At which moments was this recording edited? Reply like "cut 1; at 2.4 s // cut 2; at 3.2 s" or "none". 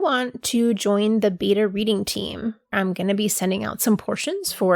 cut 1; at 2.7 s